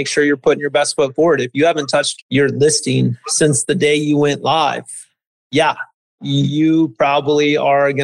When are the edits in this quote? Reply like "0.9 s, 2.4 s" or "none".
none

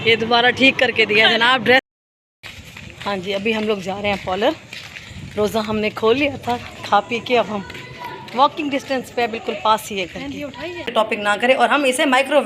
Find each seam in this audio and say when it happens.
1.8 s, 10.9 s

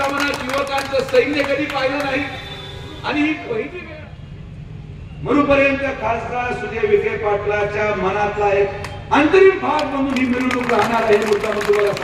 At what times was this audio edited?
3.8 s

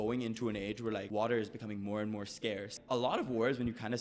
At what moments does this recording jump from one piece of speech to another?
1.1 s, 2.8 s

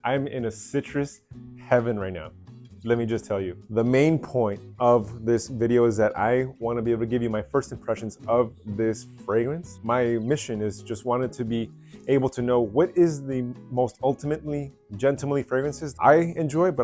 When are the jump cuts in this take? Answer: 3.6 s

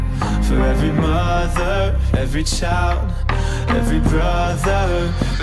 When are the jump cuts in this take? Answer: none

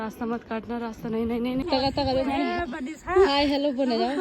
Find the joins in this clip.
1.6 s

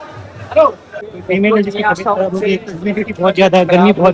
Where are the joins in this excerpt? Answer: 1.0 s

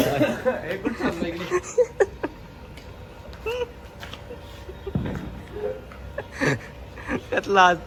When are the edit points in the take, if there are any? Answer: none

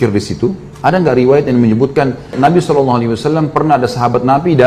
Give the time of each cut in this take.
2.3 s

